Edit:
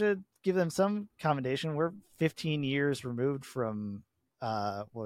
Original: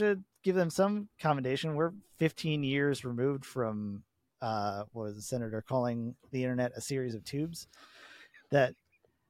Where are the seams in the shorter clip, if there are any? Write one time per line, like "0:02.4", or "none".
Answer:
none